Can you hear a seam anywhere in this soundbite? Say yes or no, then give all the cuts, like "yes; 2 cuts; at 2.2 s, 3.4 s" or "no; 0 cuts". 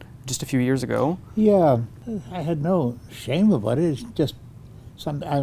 yes; 1 cut; at 2.0 s